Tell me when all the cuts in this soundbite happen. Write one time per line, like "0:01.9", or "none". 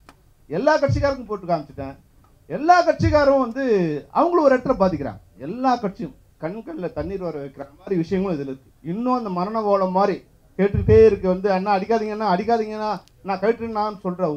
0:06.2